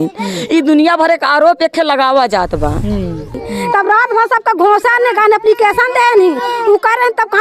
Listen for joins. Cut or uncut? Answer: cut